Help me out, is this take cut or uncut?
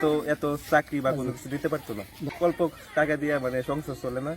cut